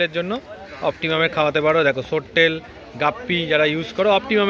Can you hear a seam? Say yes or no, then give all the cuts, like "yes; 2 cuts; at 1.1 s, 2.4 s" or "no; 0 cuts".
no; 0 cuts